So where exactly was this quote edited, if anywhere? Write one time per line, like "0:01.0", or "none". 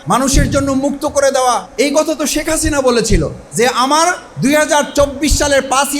0:01.7
0:03.4